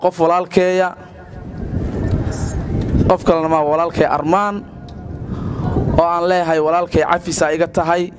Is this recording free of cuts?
yes; 0 cuts

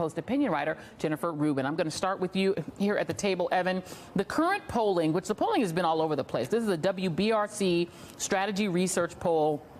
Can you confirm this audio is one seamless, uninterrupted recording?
no; 1 cut; at 5.7 s

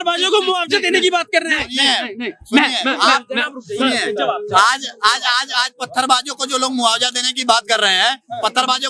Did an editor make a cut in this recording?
no; 0 cuts

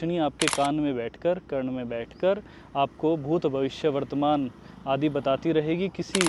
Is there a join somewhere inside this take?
no; 0 cuts

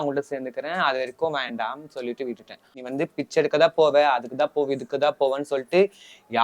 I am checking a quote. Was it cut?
yes; 1 cut; at 2.7 s

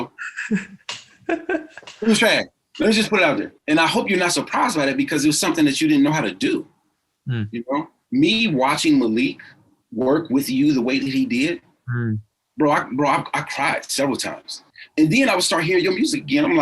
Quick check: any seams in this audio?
yes; 3 cuts; at 2.6 s, 3.5 s, 14.7 s

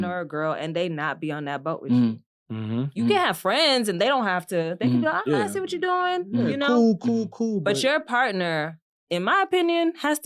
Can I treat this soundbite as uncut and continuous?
yes; 0 cuts

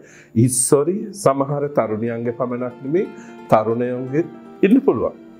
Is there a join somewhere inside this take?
no; 0 cuts

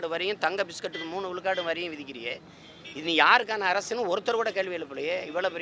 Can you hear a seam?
no; 0 cuts

